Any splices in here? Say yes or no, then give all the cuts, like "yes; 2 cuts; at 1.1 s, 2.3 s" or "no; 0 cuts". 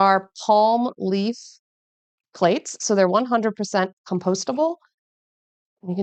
no; 0 cuts